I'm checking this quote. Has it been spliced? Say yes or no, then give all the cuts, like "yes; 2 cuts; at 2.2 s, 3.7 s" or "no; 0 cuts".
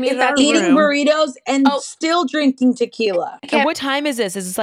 yes; 1 cut; at 3.5 s